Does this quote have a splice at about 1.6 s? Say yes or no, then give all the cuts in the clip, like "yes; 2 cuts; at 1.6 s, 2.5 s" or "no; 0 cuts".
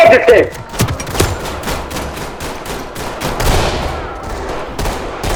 no; 0 cuts